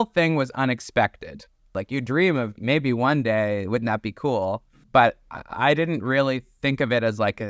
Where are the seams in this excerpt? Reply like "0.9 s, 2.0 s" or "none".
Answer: 1.8 s, 4.7 s

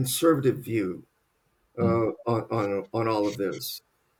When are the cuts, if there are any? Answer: none

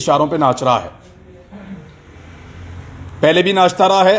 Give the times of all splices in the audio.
none

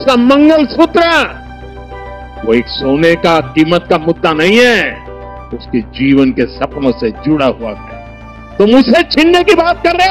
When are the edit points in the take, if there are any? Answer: none

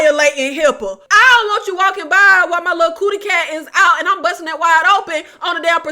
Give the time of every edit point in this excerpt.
1.0 s

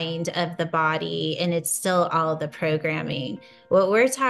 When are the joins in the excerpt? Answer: none

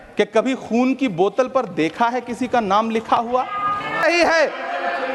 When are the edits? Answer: 4.0 s

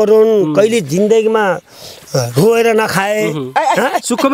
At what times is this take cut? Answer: none

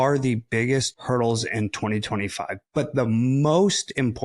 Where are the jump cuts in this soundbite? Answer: 0.9 s

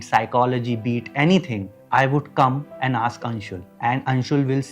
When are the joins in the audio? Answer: 2.7 s

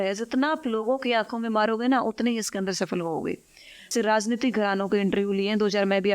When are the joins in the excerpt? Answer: 3.9 s

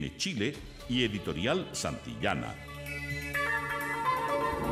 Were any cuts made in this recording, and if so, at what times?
2.5 s

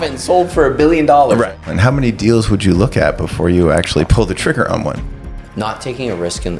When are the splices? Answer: 1.5 s, 5.2 s

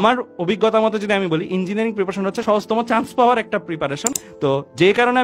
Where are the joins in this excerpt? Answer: 2.4 s, 4.1 s

